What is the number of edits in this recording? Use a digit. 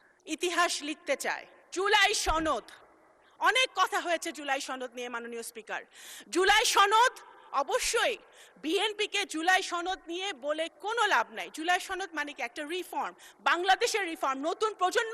1